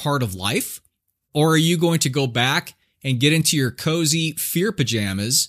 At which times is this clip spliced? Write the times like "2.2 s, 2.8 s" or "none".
none